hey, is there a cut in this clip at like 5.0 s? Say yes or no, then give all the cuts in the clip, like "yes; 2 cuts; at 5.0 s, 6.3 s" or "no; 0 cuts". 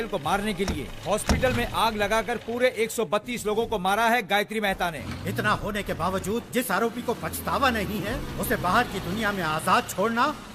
yes; 1 cut; at 5.0 s